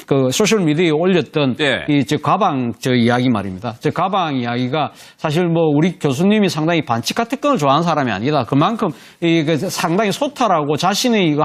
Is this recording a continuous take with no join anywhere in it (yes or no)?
yes